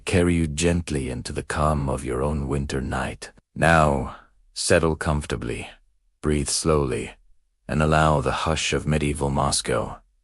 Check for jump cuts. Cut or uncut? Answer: cut